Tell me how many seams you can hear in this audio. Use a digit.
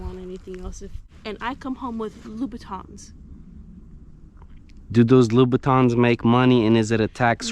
1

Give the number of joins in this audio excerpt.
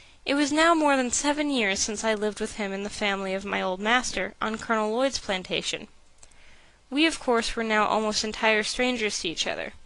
1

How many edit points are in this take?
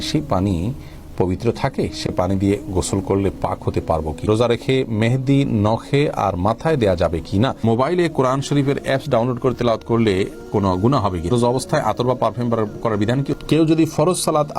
4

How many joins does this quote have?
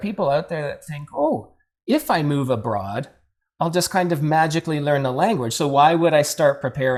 0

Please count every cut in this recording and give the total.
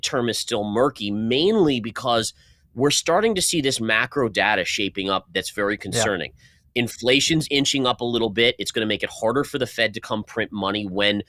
0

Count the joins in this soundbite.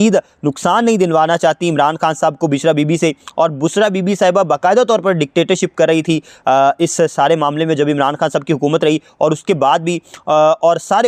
0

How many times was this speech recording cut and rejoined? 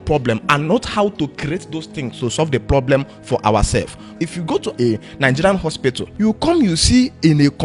2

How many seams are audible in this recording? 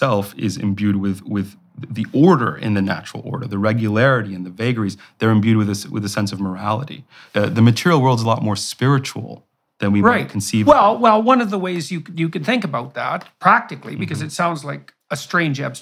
1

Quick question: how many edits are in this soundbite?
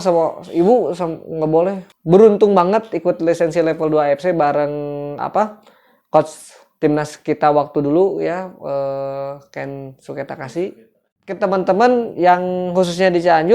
2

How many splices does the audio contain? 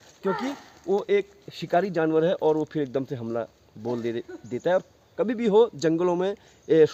0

